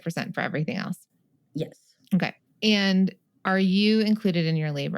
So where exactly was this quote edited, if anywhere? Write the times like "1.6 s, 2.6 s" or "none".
2.4 s, 3.3 s

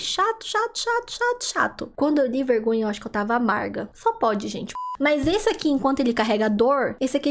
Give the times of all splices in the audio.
1.9 s, 4.9 s

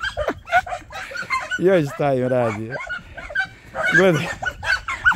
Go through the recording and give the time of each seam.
none

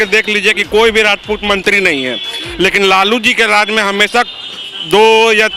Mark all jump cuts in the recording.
none

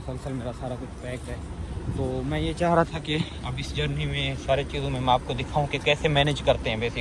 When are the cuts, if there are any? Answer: none

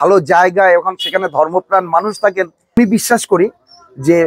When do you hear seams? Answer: 2.8 s

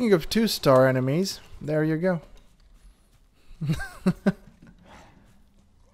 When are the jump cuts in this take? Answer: none

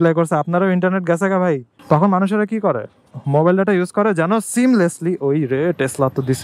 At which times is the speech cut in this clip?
1.7 s

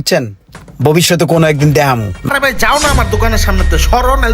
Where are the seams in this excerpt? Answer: 2.3 s

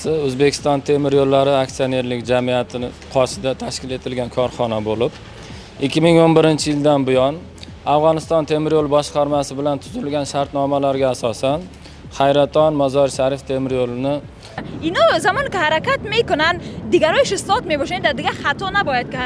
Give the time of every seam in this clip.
14.6 s

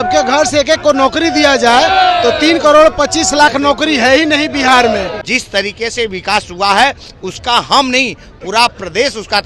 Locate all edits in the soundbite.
5.2 s

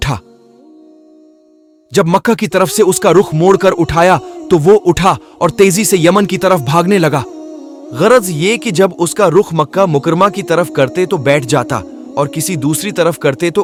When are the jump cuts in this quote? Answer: none

